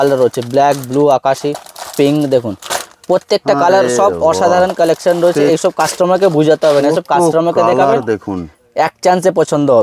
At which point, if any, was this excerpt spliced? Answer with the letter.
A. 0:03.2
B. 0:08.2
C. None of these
C